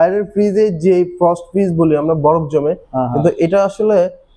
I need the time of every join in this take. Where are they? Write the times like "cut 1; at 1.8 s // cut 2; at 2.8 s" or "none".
none